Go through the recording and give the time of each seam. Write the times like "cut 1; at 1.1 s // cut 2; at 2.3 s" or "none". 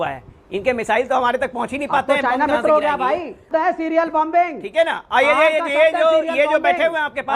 cut 1; at 3.4 s

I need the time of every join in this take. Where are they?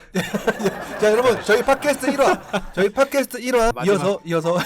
cut 1; at 3.7 s

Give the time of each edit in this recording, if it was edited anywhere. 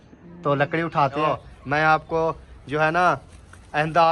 cut 1; at 1.2 s

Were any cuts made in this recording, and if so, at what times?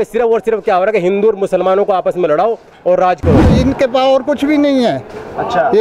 cut 1; at 3.5 s

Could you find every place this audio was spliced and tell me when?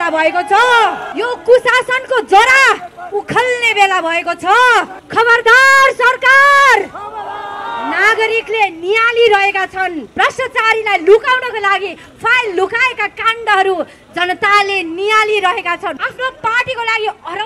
cut 1; at 1.0 s // cut 2; at 5.0 s // cut 3; at 10.0 s // cut 4; at 16.1 s

